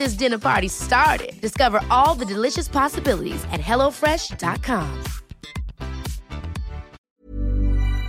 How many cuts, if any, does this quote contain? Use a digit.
1